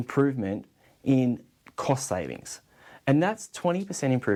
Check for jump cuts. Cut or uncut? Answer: uncut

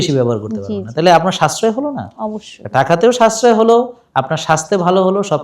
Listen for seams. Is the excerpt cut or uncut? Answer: uncut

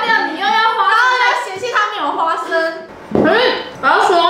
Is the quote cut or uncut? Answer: cut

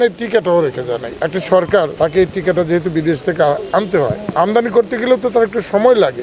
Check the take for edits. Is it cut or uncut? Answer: cut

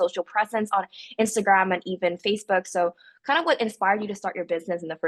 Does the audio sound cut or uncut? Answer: uncut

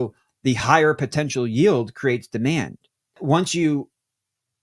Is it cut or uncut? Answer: cut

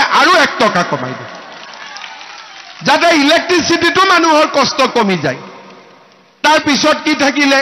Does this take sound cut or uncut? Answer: uncut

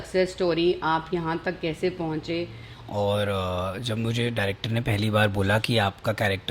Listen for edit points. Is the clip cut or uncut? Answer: cut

